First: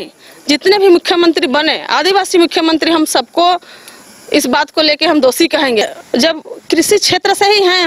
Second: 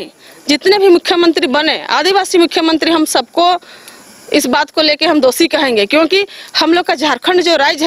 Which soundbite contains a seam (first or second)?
first